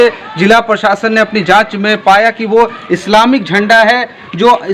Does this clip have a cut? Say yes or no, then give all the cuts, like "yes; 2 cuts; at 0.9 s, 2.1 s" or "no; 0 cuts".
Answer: no; 0 cuts